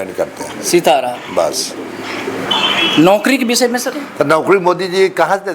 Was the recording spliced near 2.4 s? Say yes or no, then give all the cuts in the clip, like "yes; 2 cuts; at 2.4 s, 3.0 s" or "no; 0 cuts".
yes; 1 cut; at 2.4 s